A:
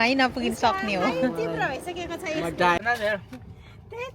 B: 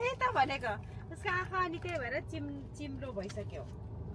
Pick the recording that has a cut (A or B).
A